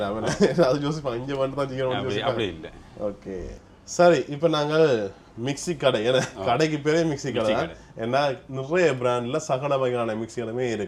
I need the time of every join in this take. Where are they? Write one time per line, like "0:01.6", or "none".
none